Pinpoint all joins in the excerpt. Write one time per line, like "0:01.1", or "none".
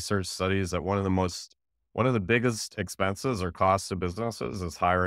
none